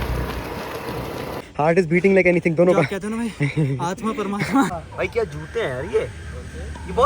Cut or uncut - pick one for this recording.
cut